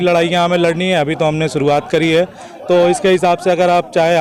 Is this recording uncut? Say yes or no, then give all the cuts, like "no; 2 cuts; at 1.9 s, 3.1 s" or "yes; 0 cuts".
yes; 0 cuts